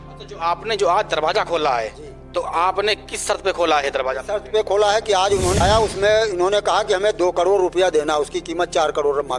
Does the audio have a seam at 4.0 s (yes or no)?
no